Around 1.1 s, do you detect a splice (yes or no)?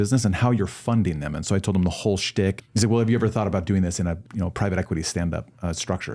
no